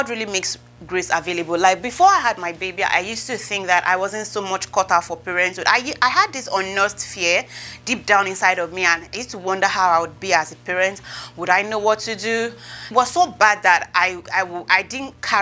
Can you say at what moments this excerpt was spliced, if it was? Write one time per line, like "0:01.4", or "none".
none